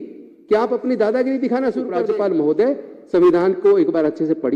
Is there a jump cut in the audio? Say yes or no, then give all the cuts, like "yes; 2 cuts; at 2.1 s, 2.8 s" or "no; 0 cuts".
yes; 1 cut; at 2.0 s